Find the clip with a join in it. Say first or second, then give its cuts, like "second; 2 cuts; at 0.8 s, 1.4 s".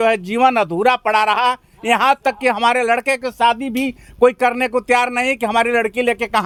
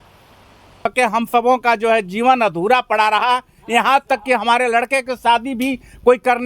second; 1 cut; at 0.9 s